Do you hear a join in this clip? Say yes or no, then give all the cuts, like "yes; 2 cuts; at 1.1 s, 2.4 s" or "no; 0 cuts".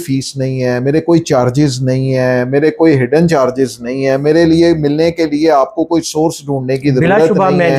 no; 0 cuts